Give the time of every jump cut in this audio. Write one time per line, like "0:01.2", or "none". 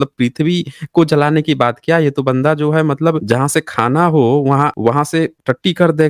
0:03.2
0:04.7